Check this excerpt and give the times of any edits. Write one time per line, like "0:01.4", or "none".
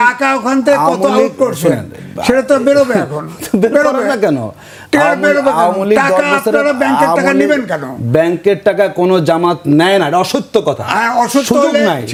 none